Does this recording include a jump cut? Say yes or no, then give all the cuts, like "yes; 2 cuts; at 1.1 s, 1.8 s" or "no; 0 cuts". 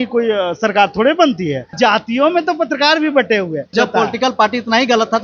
yes; 2 cuts; at 1.8 s, 3.7 s